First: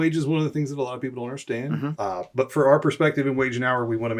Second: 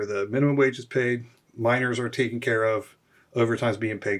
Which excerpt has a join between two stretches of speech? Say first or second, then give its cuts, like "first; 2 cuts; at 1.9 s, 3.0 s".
first; 1 cut; at 1.9 s